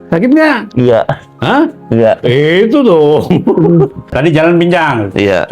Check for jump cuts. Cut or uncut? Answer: cut